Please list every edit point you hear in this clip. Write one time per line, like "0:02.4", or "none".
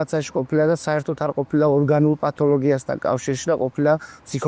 none